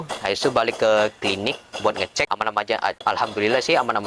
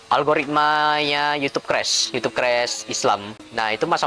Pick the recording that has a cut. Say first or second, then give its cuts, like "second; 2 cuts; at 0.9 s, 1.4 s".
first; 1 cut; at 2.6 s